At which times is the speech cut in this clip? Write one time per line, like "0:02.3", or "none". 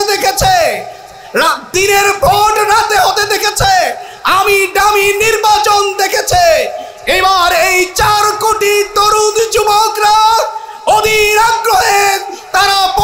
none